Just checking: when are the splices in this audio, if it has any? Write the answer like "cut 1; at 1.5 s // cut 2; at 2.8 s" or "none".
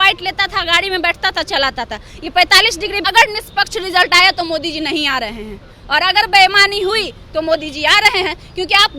cut 1; at 3.0 s